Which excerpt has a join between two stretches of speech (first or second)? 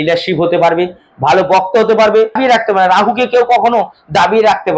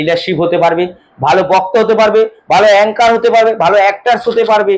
first